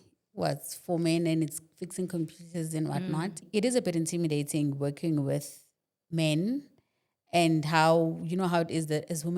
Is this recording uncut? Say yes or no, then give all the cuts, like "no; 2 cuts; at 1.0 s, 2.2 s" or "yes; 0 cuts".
no; 1 cut; at 3.4 s